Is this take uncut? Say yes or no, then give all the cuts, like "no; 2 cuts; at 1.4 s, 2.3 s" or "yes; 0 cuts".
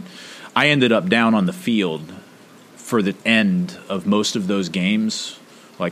no; 1 cut; at 3.2 s